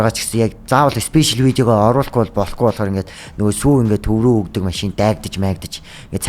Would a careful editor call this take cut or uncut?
uncut